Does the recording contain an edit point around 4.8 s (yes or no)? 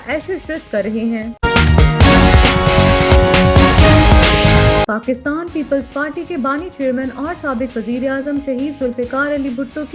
yes